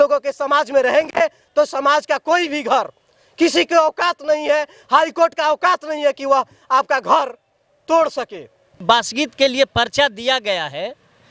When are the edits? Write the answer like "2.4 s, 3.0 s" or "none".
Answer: 8.8 s

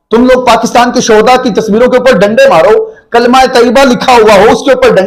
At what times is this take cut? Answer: none

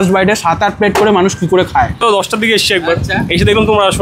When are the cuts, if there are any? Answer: 2.0 s

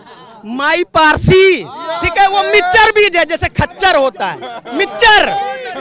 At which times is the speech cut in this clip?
none

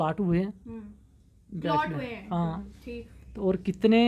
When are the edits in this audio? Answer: none

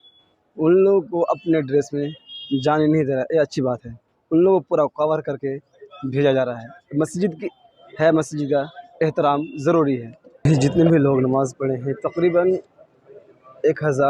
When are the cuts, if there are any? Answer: 10.1 s

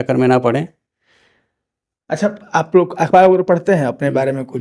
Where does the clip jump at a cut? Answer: none

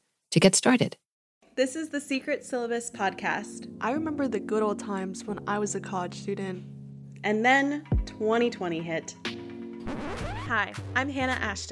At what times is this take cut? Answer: 3.7 s, 10.2 s

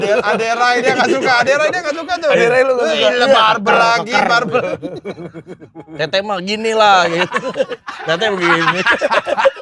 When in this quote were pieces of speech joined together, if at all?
none

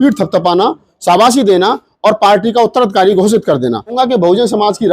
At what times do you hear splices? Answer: 3.9 s

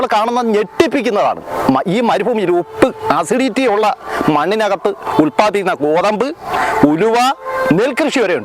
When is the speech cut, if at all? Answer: none

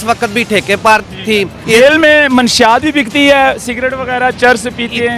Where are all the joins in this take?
1.6 s

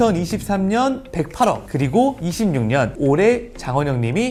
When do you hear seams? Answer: none

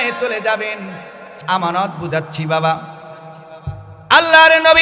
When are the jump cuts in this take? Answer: 1.3 s

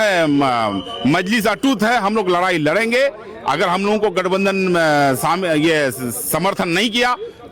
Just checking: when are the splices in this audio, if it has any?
none

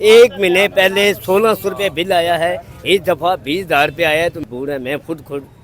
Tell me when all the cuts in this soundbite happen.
4.4 s

